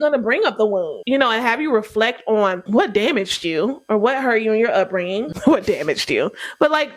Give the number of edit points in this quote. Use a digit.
2